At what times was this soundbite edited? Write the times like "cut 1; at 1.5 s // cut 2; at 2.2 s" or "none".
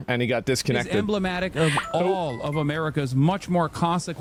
none